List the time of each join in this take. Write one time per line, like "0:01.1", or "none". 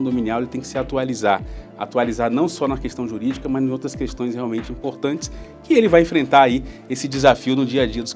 none